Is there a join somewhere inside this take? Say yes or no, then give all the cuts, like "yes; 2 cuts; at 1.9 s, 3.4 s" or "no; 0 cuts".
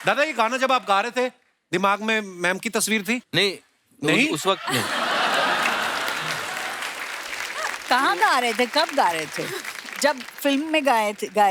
no; 0 cuts